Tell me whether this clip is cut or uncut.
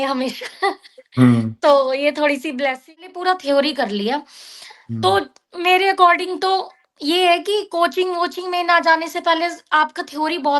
cut